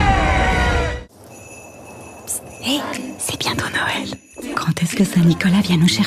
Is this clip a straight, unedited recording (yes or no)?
no